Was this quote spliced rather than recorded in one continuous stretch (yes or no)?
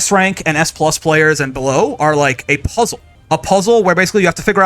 yes